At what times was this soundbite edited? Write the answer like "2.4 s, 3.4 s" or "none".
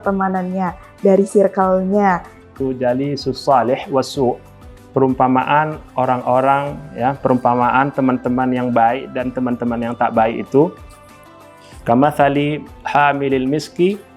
2.6 s